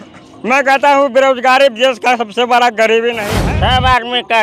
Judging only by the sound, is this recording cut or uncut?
cut